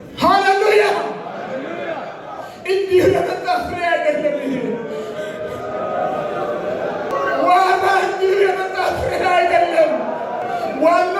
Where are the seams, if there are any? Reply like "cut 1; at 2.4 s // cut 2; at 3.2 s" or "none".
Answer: cut 1; at 7.1 s // cut 2; at 10.4 s